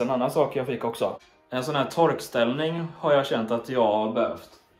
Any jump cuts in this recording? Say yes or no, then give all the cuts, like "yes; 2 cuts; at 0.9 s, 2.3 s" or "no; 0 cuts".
no; 0 cuts